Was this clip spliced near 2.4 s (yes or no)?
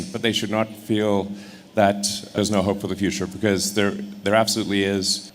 yes